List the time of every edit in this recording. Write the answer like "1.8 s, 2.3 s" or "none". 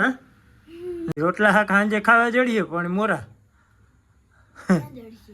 1.1 s